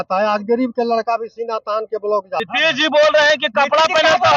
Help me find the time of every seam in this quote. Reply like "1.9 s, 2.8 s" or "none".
2.4 s